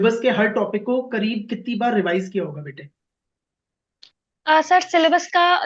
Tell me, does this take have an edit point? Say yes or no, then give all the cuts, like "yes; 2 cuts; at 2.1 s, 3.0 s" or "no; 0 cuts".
no; 0 cuts